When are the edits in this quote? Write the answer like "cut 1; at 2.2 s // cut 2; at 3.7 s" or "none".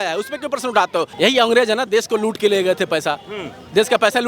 cut 1; at 1.1 s